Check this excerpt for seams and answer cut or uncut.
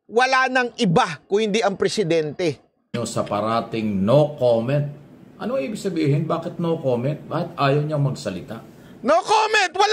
cut